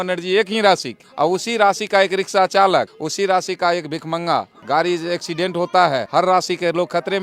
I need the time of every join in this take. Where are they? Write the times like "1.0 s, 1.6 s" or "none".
1.0 s, 3.0 s, 4.5 s, 6.1 s

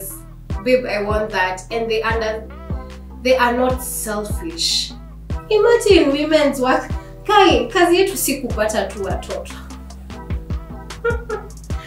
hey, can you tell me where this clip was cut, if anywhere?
5.3 s

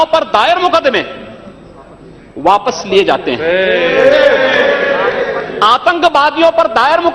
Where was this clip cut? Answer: none

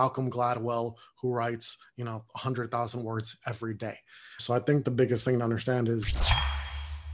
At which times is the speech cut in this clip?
4.3 s, 6.2 s

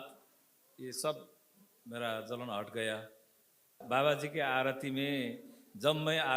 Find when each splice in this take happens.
3.8 s

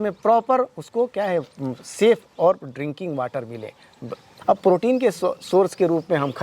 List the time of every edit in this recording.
4.3 s

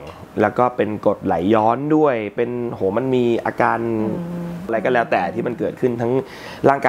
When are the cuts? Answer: 4.7 s

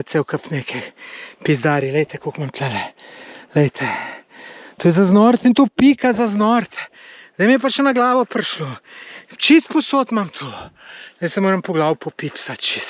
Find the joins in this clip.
none

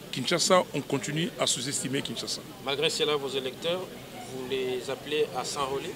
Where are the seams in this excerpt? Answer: none

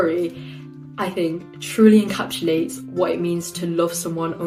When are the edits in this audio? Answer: none

